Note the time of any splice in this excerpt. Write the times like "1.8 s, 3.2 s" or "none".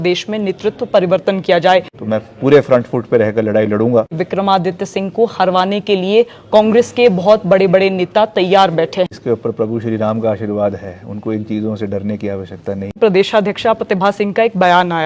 1.9 s, 4.2 s, 9.2 s, 12.9 s

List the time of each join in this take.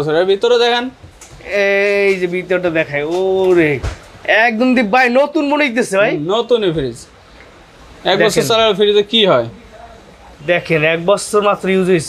none

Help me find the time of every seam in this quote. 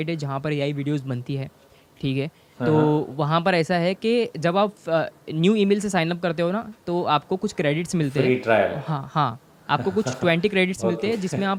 none

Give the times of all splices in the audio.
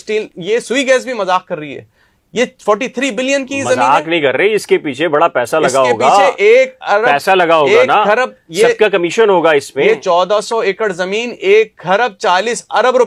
none

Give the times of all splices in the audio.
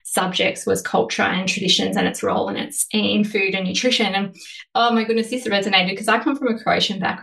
none

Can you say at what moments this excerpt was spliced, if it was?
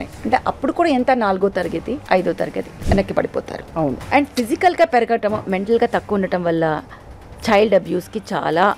2.0 s, 2.7 s, 4.0 s

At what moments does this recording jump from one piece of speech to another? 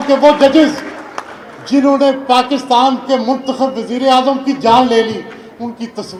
none

